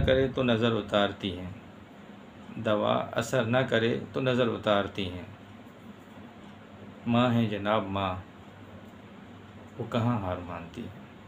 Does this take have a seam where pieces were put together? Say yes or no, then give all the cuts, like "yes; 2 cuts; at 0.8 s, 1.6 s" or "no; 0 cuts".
no; 0 cuts